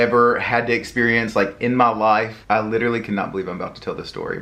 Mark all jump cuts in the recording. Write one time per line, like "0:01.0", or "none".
0:02.4